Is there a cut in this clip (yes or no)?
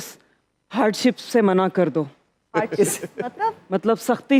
no